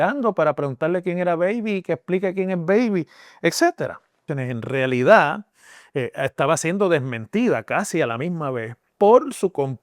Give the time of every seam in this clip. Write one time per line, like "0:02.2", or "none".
0:04.3